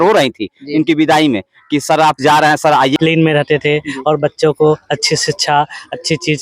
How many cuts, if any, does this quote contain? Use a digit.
1